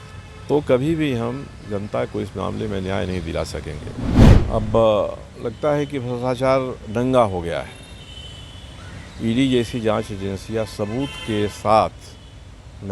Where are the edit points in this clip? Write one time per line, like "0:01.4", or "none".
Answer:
0:04.3